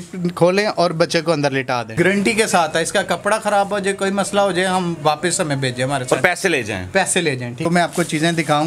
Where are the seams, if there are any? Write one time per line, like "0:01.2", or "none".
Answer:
0:01.9
0:07.7